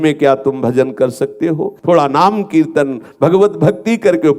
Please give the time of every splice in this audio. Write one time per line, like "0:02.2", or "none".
0:01.7